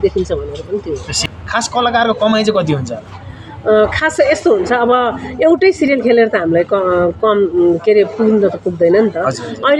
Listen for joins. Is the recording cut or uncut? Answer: cut